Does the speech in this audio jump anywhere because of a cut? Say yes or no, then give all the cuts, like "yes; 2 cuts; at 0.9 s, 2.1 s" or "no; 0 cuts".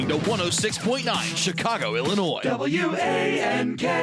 no; 0 cuts